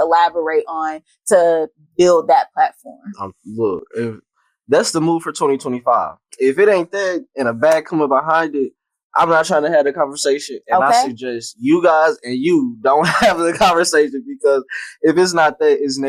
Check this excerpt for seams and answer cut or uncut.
uncut